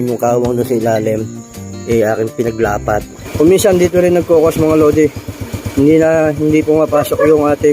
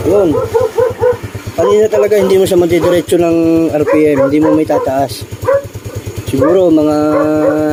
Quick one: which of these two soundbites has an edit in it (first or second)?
first